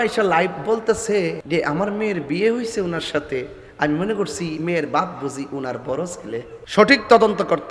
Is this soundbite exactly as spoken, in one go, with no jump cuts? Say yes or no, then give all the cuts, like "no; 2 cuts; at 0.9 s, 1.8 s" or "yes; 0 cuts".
no; 2 cuts; at 1.4 s, 6.6 s